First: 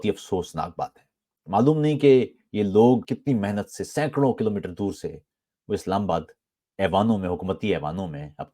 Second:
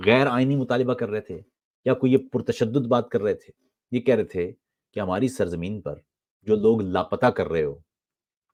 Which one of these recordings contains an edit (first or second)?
first